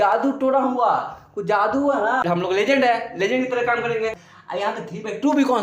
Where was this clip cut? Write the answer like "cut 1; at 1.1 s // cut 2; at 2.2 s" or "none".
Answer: cut 1; at 2.2 s // cut 2; at 4.3 s